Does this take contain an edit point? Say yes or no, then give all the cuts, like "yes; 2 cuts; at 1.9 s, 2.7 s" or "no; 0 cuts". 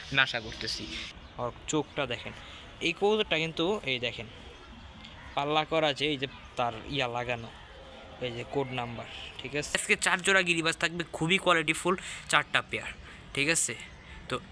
yes; 2 cuts; at 1.0 s, 9.8 s